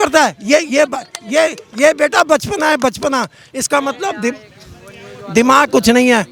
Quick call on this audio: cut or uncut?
uncut